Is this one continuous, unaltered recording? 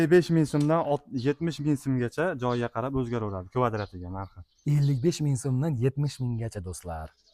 yes; 0 cuts

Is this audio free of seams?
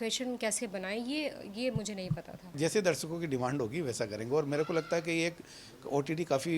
no; 1 cut; at 2.5 s

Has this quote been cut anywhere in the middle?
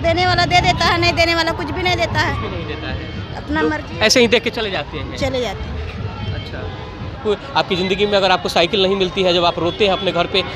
yes; 1 cut; at 7.2 s

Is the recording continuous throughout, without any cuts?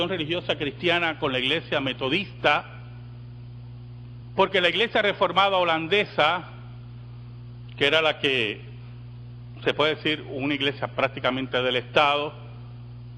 no; 1 cut; at 8.2 s

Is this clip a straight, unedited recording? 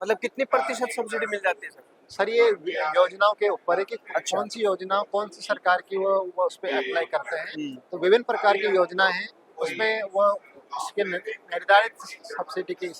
yes; 0 cuts

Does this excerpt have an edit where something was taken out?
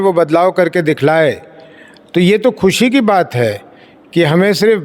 no; 0 cuts

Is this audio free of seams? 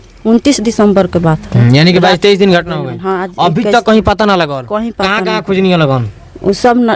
yes; 0 cuts

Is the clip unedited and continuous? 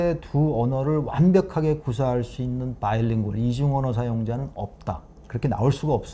no; 1 cut; at 5.1 s

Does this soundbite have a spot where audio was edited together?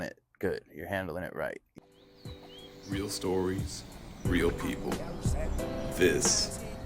yes; 1 cut; at 1.7 s

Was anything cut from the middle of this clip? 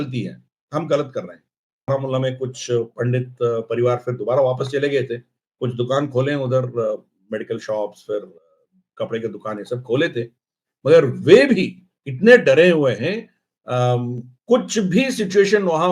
yes; 1 cut; at 1.9 s

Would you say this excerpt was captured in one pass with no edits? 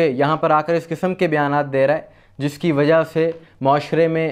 yes; 0 cuts

